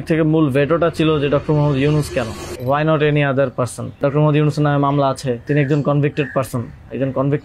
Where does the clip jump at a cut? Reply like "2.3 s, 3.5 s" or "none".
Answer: 2.5 s, 4.0 s, 5.4 s